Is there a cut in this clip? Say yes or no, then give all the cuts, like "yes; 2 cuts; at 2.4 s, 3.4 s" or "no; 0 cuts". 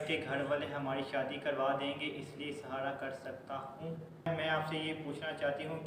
yes; 1 cut; at 4.3 s